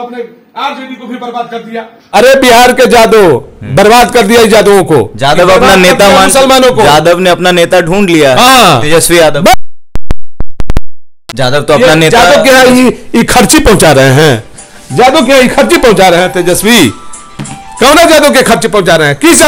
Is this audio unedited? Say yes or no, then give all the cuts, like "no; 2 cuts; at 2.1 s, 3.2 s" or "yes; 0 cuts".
no; 2 cuts; at 2.1 s, 11.2 s